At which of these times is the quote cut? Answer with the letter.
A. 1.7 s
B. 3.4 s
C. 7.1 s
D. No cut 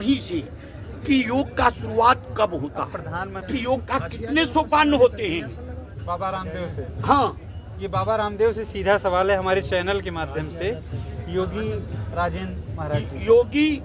B